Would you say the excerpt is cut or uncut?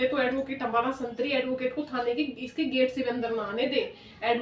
uncut